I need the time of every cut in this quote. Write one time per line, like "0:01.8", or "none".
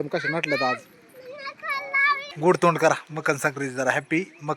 0:02.3